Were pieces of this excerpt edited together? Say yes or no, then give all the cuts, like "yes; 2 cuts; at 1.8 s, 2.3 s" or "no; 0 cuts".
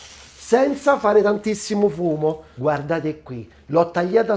yes; 1 cut; at 2.5 s